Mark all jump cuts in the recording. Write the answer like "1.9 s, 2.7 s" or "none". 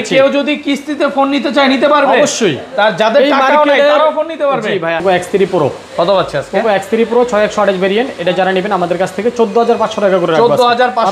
5.0 s